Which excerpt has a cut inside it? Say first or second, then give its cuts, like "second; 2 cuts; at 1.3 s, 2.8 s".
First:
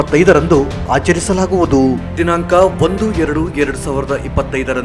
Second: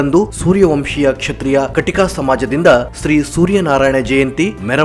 first; 1 cut; at 2.1 s